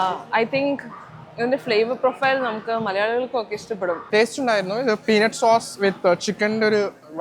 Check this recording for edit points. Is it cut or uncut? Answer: cut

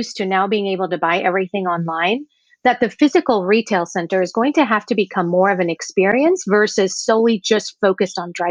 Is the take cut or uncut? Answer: uncut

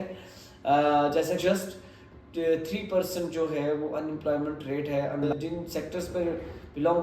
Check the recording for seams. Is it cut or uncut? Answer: cut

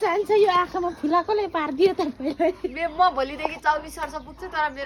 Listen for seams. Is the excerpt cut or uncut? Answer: uncut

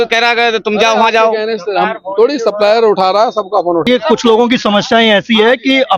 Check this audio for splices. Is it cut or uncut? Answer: cut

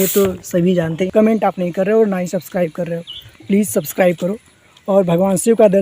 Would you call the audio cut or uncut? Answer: cut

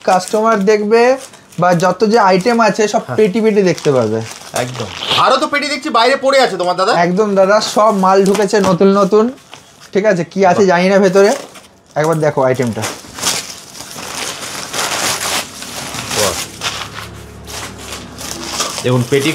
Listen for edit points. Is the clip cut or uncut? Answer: uncut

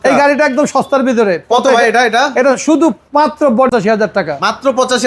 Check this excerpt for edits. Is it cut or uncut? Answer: cut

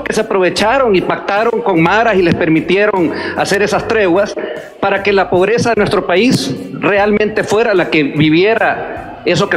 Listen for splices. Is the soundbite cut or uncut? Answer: uncut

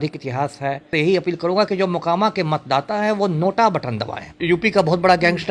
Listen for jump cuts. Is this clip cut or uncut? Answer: cut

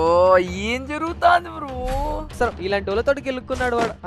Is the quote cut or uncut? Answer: uncut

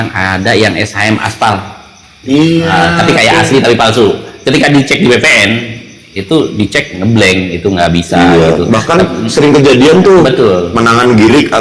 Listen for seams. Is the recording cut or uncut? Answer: uncut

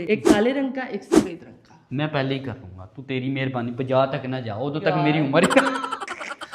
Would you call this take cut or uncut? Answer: uncut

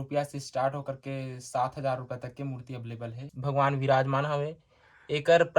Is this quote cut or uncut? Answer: cut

